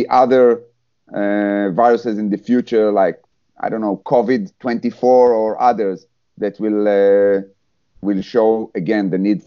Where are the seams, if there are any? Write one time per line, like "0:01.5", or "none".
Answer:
none